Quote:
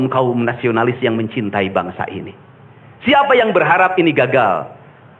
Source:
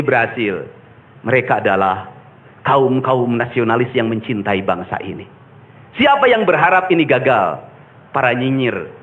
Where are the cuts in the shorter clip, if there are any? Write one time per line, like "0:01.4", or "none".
none